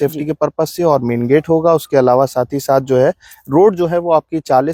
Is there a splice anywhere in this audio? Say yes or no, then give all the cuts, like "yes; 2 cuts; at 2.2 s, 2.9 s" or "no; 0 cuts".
no; 0 cuts